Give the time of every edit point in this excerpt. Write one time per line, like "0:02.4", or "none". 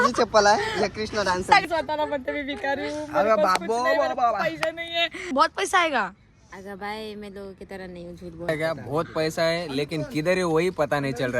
0:01.6
0:05.3
0:08.5